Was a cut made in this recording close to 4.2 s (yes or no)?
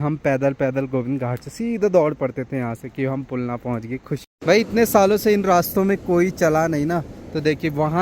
yes